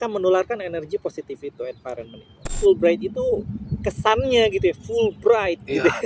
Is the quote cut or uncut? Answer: cut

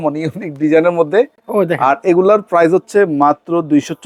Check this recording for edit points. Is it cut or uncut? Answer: uncut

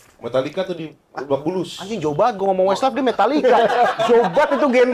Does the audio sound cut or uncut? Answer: uncut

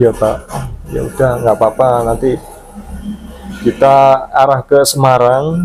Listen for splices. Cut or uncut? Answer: uncut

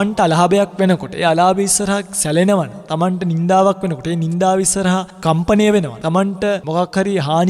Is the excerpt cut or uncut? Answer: cut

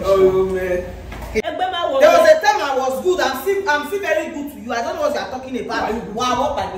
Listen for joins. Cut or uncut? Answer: cut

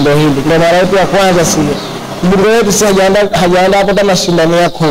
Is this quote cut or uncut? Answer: cut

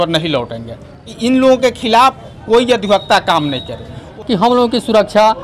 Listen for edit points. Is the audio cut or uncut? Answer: cut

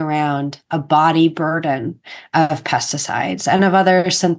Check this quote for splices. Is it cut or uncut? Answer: uncut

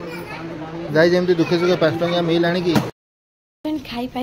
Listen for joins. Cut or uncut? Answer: cut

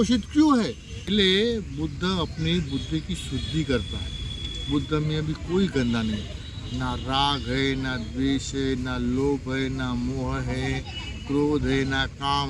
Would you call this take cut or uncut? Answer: cut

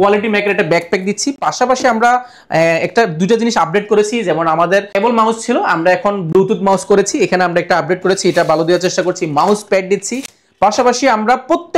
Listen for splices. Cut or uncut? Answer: uncut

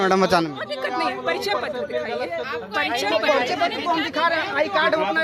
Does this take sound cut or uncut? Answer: uncut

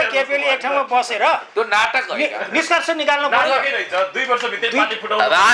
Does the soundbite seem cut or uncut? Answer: uncut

